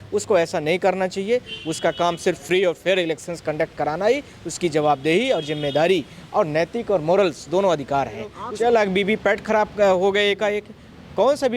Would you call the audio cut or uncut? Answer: cut